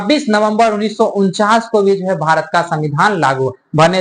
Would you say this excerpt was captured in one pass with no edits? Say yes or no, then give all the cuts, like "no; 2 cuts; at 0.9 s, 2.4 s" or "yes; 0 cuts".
yes; 0 cuts